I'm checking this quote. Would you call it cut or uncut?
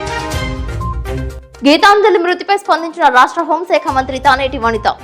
cut